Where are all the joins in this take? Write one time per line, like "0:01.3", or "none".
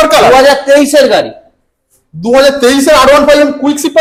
none